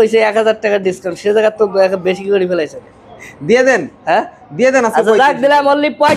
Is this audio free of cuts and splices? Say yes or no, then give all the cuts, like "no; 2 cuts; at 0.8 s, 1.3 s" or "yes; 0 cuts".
yes; 0 cuts